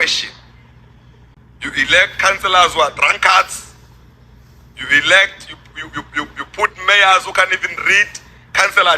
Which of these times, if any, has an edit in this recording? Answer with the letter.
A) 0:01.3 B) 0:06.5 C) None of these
A